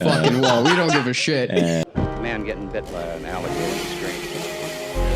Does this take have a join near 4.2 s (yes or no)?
no